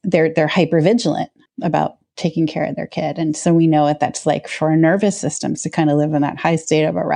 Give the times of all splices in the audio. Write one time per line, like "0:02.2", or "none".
0:01.4